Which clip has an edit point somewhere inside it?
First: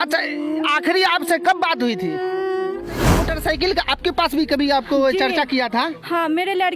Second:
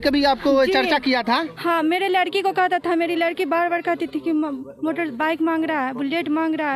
first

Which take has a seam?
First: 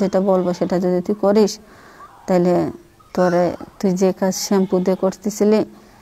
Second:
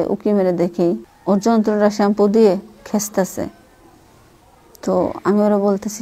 second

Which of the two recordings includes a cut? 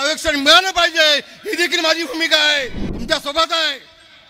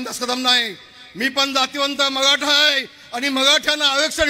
first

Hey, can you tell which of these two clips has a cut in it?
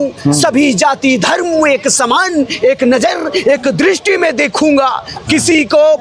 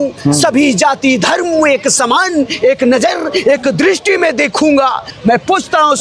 second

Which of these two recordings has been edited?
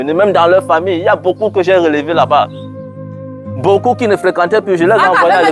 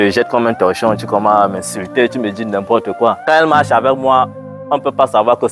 second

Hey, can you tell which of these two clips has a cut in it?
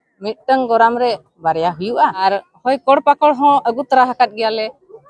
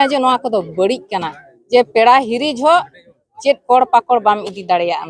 first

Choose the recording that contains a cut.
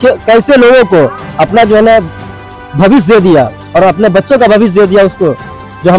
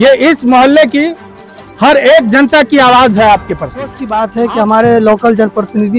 second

